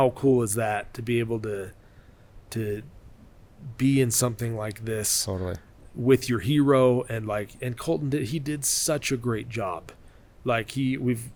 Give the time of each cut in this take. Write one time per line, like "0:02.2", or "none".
none